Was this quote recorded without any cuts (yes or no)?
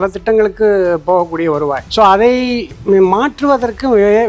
no